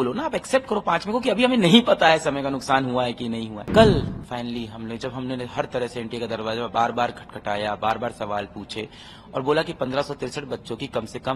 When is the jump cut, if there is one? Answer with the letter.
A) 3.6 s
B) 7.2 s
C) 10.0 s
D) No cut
A